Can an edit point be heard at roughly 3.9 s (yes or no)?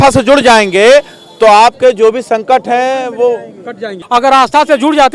yes